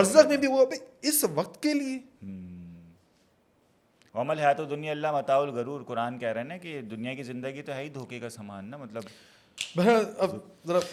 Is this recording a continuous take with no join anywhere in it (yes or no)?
yes